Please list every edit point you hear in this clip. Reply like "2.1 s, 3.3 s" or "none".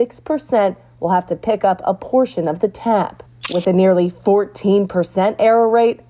3.6 s